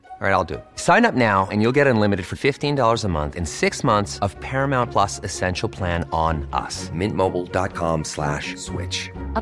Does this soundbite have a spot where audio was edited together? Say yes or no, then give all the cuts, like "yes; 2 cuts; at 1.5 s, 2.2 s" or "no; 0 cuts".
no; 0 cuts